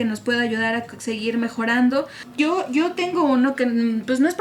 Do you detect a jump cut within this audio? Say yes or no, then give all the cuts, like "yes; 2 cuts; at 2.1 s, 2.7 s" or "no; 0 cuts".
yes; 1 cut; at 2.2 s